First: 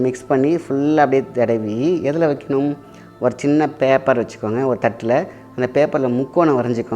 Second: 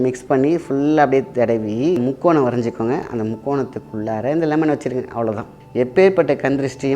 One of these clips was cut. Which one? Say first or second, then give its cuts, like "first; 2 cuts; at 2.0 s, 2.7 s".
second; 2 cuts; at 2.0 s, 5.5 s